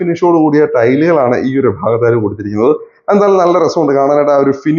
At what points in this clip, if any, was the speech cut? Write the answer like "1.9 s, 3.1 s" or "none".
none